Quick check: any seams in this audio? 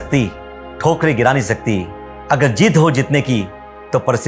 no; 0 cuts

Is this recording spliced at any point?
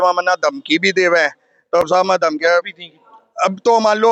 no; 0 cuts

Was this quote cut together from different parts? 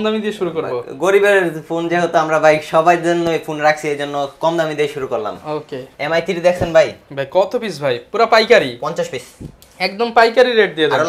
no; 0 cuts

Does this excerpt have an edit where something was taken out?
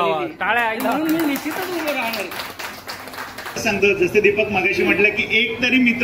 yes; 1 cut; at 3.6 s

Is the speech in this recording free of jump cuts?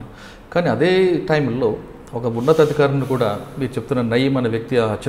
yes; 0 cuts

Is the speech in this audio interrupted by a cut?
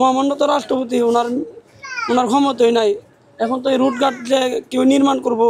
no; 0 cuts

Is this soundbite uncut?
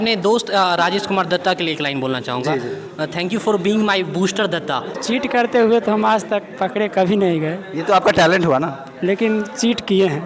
no; 1 cut; at 5.0 s

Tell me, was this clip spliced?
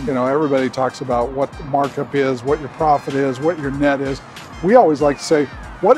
no; 0 cuts

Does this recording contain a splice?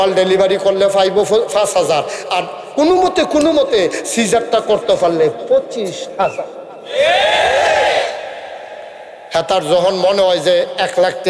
no; 0 cuts

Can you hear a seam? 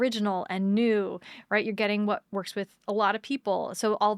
yes; 1 cut; at 2.3 s

